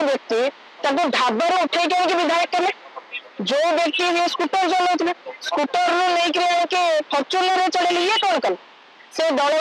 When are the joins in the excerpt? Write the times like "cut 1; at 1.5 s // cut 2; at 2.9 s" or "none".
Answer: none